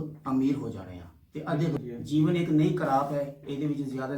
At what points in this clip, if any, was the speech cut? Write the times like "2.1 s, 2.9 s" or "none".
1.8 s